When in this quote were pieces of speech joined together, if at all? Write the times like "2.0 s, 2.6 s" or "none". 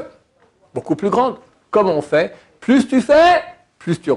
1.5 s